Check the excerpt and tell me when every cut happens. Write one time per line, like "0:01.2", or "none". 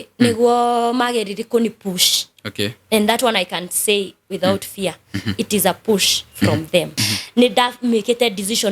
0:07.0